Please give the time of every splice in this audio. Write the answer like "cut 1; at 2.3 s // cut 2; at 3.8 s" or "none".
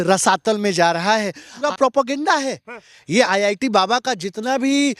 cut 1; at 1.6 s